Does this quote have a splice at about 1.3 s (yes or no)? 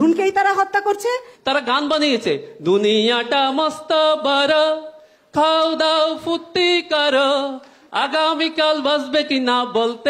yes